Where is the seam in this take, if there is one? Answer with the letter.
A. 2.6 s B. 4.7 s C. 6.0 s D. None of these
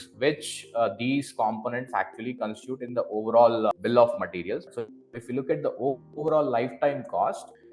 B